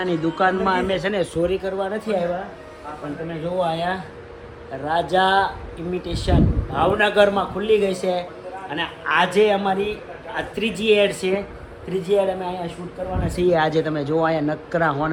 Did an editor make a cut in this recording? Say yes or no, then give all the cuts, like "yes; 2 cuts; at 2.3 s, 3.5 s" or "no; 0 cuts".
no; 0 cuts